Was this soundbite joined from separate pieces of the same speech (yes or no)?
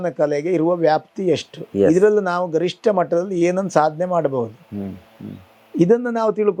no